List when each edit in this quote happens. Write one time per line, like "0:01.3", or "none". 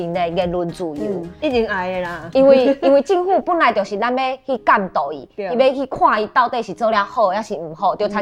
none